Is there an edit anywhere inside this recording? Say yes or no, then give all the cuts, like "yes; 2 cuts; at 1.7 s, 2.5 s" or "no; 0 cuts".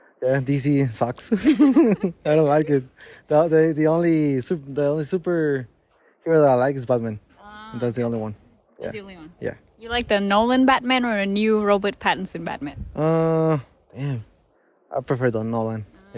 no; 0 cuts